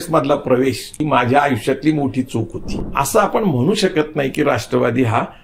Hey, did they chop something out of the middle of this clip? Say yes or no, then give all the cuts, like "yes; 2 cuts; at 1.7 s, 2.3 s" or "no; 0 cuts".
yes; 2 cuts; at 0.9 s, 2.6 s